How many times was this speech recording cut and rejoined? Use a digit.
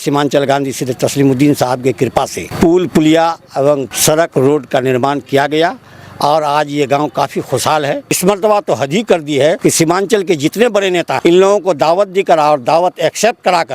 1